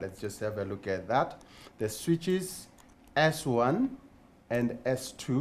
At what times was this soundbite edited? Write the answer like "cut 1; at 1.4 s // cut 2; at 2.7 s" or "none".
none